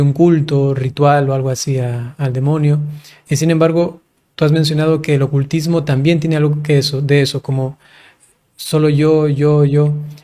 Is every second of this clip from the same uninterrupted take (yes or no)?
yes